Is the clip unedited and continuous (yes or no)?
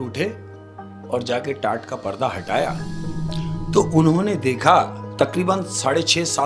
yes